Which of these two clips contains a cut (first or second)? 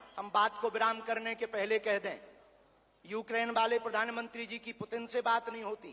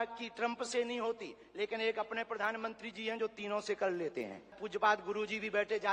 second